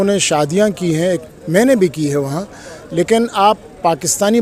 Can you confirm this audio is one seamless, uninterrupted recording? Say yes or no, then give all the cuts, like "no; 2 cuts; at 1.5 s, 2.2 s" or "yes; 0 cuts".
yes; 0 cuts